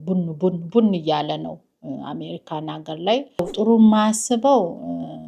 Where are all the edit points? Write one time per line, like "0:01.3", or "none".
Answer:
0:03.5